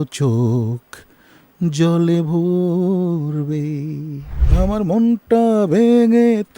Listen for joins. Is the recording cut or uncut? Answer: cut